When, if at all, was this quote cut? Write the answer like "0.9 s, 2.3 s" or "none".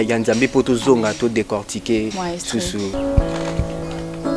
none